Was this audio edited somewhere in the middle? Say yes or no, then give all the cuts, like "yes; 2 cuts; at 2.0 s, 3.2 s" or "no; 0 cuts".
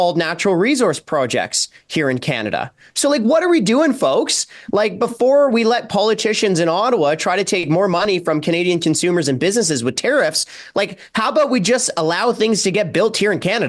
no; 0 cuts